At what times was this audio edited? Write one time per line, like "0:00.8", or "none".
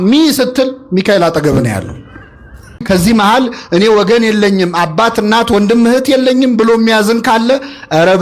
0:02.8

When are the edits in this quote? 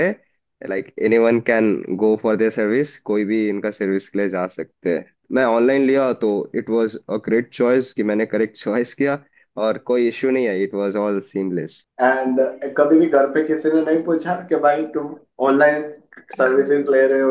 0:05.2
0:11.8

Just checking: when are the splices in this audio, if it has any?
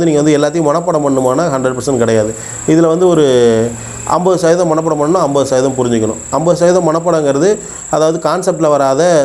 none

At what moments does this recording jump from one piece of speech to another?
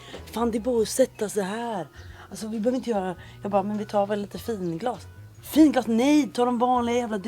none

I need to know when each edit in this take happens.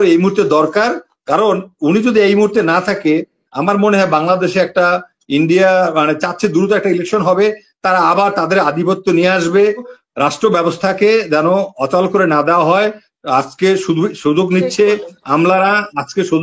0:09.9

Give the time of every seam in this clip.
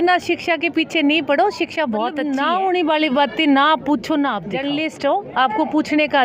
0:02.2
0:04.6

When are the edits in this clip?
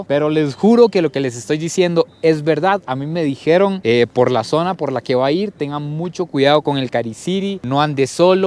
none

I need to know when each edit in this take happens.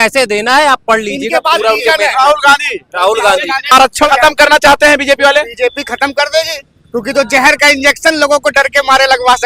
0:03.7

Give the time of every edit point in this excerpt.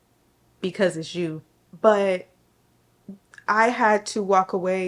none

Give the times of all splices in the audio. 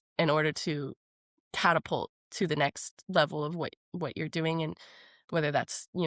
none

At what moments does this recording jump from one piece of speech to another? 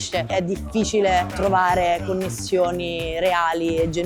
none

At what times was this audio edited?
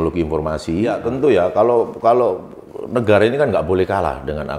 0:01.0

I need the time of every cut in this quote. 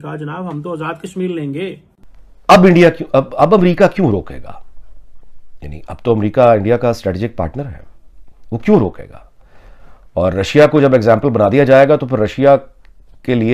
none

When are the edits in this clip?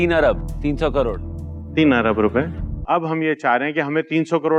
0:02.7

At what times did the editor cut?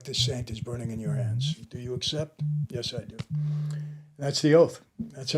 none

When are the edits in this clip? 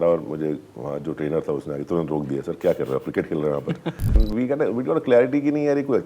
0:04.2

